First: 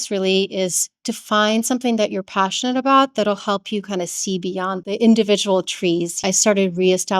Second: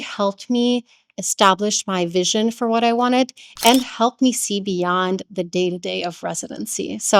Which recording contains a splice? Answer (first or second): first